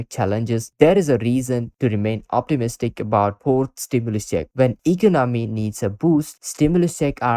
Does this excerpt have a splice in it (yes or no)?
yes